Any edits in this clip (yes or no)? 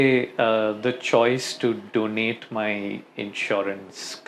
no